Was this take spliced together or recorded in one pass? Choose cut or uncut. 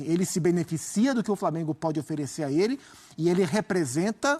uncut